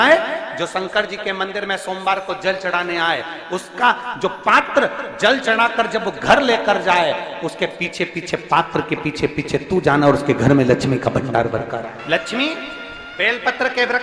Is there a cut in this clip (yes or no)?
yes